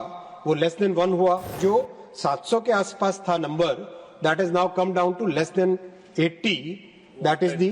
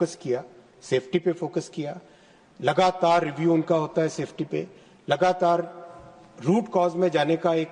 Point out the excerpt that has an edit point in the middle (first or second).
first